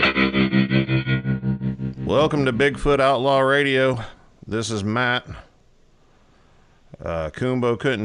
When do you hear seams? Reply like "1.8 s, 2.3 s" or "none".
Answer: 1.8 s